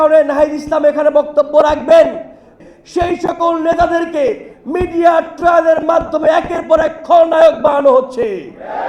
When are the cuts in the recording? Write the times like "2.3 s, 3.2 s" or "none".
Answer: 2.5 s

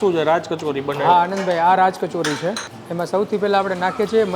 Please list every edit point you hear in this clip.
2.7 s

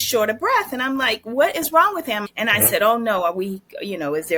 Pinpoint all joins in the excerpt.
2.3 s

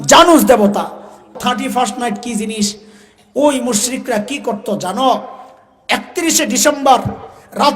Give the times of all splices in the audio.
1.3 s

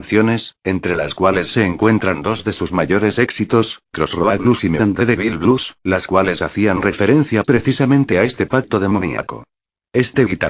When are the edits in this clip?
2.7 s

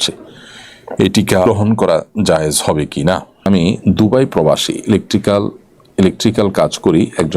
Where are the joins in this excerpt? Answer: 1.5 s, 3.5 s

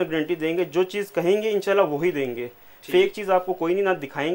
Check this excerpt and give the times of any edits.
none

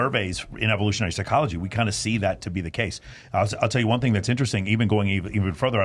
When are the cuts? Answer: none

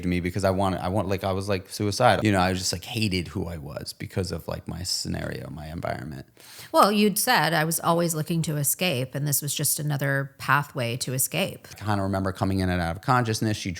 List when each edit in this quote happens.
2.2 s, 11.7 s

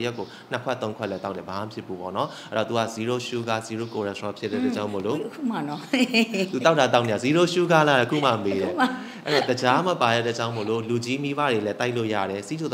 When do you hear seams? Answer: none

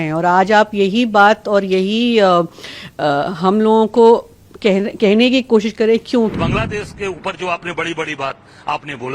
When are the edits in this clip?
6.3 s

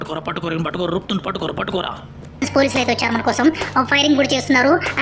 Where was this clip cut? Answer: 2.5 s

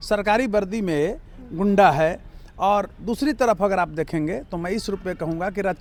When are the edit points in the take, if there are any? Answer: none

